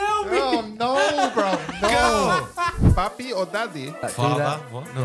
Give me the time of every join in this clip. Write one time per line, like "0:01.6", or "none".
0:02.8
0:04.0